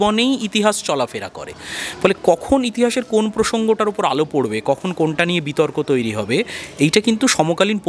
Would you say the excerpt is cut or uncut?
uncut